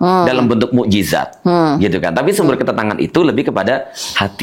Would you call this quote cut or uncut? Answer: uncut